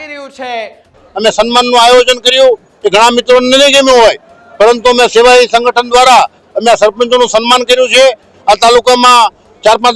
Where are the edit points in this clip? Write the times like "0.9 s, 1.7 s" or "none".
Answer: 1.0 s, 8.3 s